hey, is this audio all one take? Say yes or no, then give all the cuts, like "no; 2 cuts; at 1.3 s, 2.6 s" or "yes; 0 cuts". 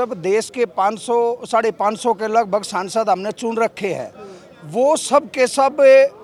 yes; 0 cuts